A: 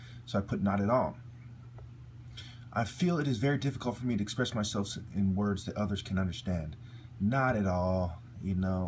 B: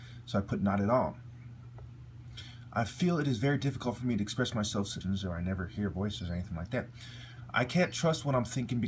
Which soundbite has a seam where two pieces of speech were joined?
A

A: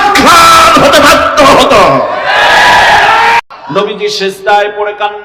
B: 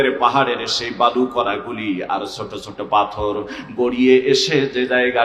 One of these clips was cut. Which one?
A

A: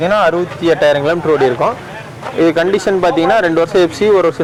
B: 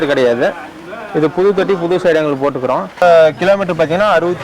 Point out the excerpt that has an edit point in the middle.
B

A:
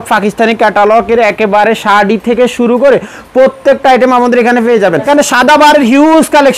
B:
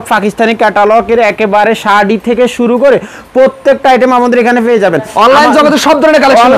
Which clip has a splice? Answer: A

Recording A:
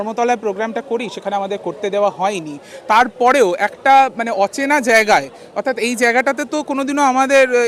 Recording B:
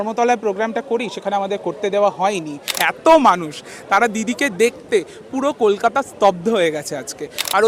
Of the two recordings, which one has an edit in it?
B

